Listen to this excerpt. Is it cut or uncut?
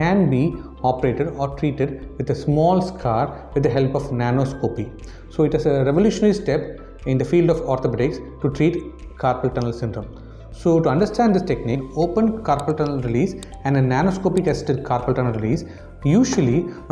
uncut